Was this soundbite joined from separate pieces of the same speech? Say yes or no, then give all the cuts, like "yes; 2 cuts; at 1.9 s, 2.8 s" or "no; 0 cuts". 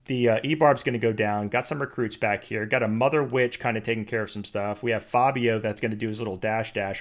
no; 0 cuts